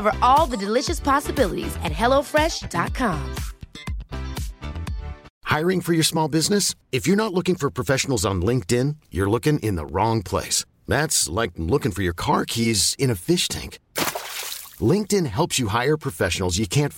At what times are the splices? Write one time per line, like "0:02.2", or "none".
0:05.3